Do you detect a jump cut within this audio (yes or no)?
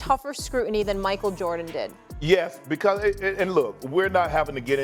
no